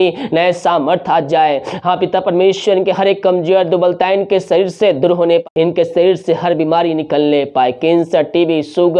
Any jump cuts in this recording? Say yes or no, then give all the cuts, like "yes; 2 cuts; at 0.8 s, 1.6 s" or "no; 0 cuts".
yes; 1 cut; at 5.4 s